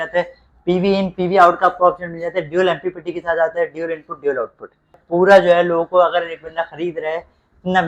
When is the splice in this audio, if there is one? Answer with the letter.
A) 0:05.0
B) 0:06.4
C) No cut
A